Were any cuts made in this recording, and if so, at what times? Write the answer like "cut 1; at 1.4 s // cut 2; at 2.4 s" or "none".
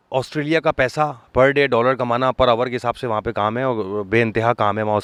none